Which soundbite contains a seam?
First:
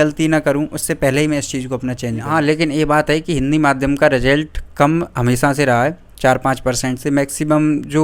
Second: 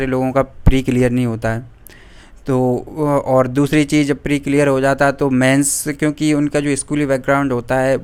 first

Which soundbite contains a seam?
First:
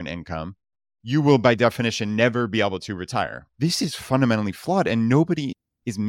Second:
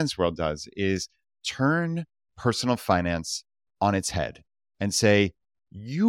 first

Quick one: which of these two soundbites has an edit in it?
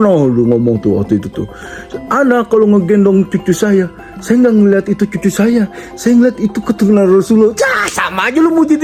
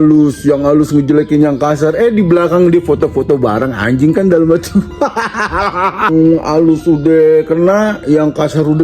second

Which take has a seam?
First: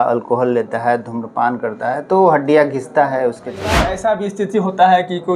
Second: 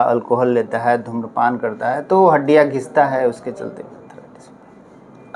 first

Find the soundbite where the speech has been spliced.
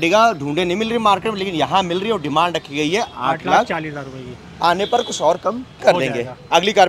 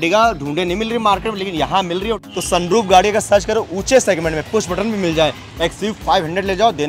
second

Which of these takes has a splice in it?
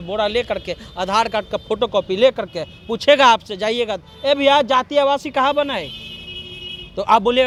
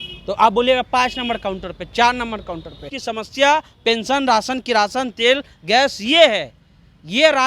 second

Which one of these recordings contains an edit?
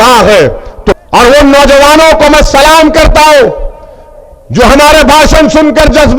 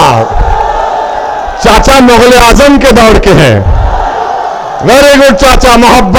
first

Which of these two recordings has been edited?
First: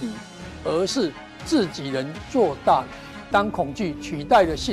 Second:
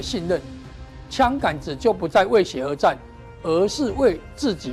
first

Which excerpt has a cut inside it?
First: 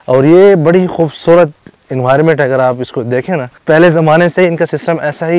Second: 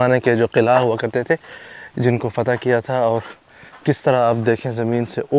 first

